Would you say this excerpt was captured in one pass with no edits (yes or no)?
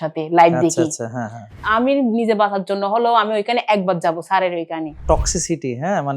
no